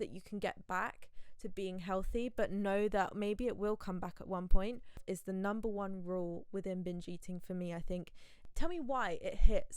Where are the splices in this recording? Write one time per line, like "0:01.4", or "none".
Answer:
0:05.0
0:08.5

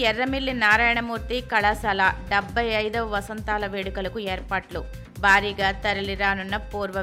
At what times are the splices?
none

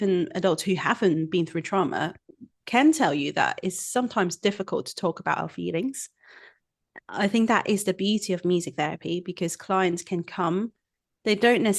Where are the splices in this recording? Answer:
none

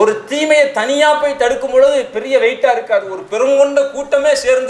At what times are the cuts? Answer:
none

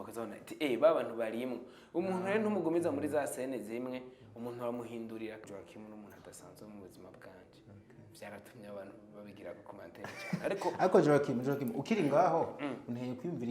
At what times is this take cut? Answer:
0:05.4

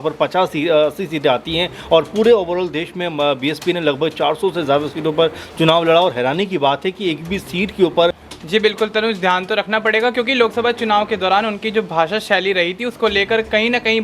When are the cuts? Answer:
0:08.3

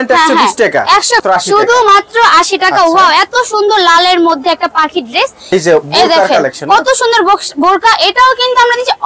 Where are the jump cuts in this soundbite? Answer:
0:01.2
0:05.5

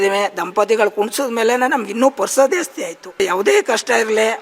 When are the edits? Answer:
0:03.2

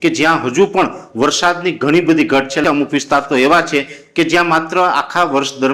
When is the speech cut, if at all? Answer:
0:02.6

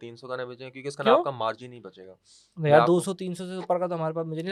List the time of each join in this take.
none

